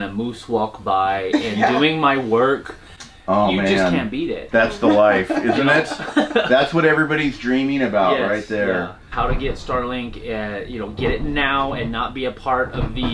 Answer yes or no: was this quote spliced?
yes